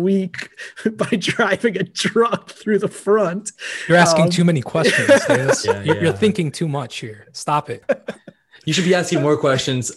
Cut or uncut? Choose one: cut